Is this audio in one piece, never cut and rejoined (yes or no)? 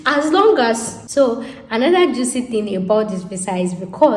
no